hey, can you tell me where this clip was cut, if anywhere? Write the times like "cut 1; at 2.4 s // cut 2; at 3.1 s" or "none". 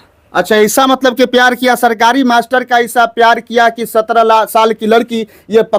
none